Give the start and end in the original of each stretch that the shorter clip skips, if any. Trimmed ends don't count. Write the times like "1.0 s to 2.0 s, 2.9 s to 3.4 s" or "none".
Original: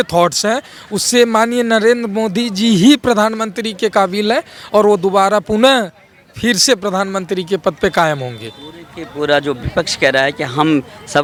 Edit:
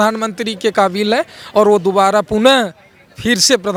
none